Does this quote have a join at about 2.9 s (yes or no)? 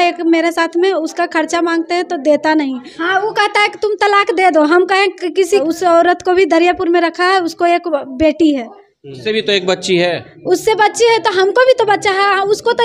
yes